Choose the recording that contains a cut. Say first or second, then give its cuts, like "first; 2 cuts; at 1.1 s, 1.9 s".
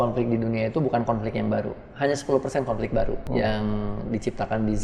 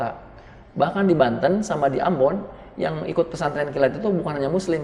first; 1 cut; at 3.2 s